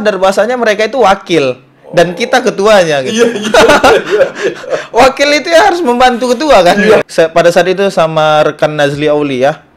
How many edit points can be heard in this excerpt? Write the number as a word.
one